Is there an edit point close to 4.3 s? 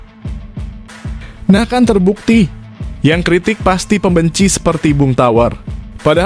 no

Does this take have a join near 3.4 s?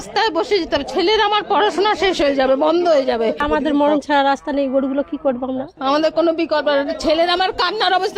yes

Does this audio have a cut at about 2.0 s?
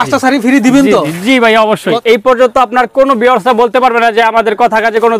yes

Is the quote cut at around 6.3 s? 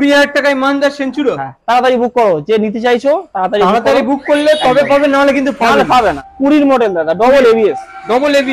yes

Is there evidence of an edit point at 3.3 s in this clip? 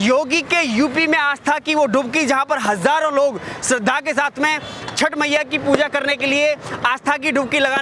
no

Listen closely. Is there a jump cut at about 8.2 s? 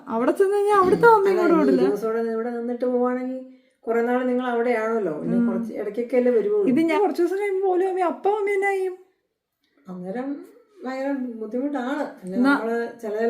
no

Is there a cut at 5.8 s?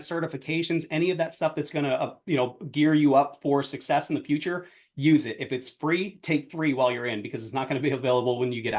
no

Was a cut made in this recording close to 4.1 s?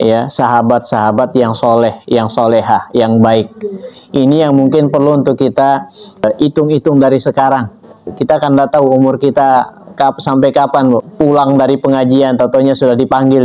no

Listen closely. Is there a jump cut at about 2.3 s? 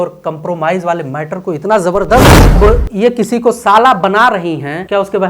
yes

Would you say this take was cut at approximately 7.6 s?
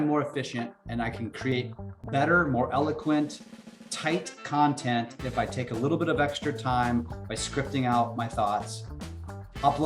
no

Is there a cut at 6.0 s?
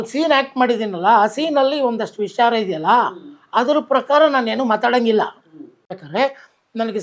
yes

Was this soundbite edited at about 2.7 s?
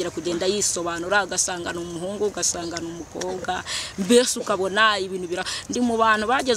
no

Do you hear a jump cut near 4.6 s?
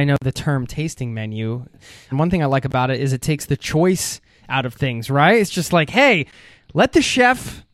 no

